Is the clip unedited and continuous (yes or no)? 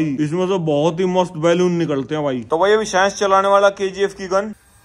no